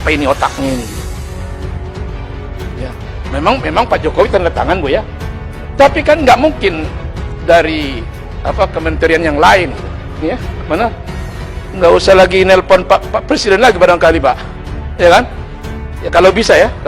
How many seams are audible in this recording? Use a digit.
1